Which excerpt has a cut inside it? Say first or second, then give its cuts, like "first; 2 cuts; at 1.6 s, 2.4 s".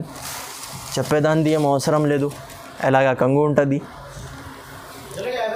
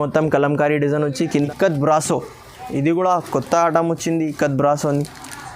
second; 1 cut; at 1.5 s